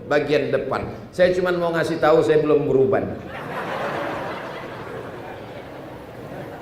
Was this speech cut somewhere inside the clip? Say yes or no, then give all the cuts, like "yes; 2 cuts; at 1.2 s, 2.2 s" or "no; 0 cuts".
no; 0 cuts